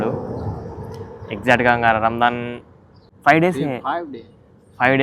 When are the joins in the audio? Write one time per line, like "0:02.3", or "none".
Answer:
none